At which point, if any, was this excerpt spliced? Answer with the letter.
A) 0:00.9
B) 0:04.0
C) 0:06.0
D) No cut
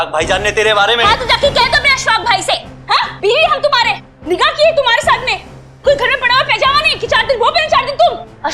D